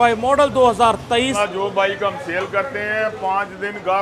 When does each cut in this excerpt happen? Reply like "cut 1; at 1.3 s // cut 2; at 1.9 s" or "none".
cut 1; at 1.4 s